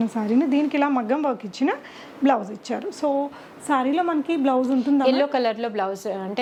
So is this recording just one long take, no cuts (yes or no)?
yes